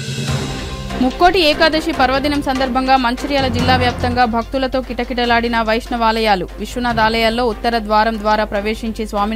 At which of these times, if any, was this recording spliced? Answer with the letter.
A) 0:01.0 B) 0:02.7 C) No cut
A